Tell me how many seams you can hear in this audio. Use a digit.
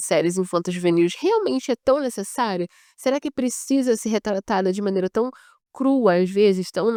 0